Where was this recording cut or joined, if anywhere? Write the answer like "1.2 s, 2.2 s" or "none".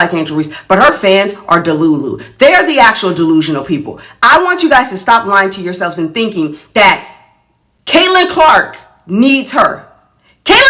none